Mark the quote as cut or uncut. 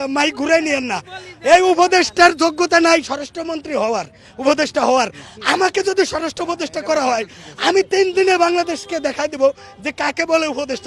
uncut